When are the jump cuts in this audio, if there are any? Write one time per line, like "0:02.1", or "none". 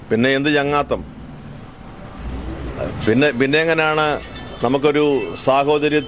none